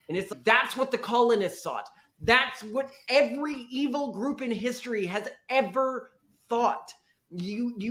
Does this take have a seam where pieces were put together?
no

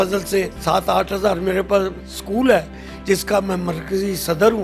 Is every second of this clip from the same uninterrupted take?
yes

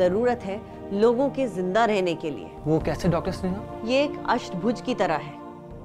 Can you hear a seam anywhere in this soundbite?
yes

